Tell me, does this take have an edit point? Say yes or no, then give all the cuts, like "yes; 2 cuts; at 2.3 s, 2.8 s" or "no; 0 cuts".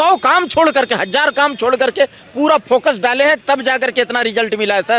no; 0 cuts